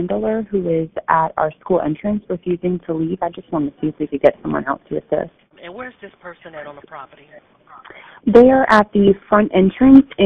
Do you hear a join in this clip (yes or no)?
no